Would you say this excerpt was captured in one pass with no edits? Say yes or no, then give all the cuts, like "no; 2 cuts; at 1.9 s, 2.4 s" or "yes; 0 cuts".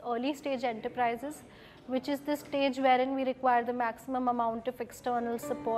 yes; 0 cuts